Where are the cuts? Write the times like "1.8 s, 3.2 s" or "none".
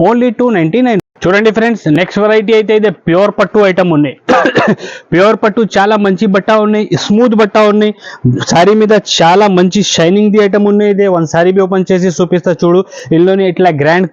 none